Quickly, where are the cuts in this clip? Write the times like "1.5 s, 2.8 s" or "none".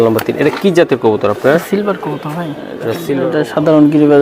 3.2 s